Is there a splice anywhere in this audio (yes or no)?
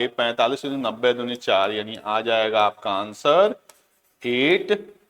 no